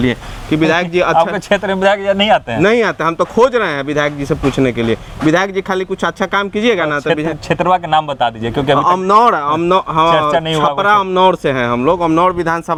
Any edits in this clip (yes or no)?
no